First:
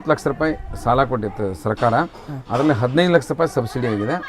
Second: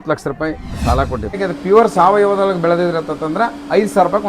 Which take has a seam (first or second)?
second